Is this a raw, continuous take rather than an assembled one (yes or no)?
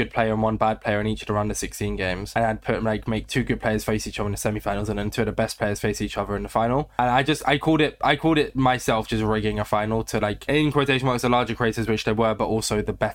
yes